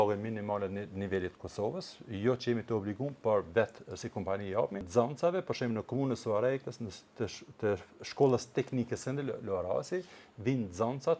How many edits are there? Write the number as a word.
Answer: one